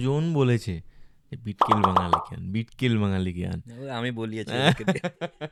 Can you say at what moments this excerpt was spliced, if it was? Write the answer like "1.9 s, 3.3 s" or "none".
none

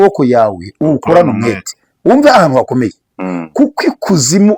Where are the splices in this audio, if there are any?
none

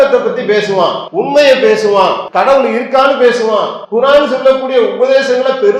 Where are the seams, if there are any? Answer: 1.0 s, 2.2 s, 3.8 s

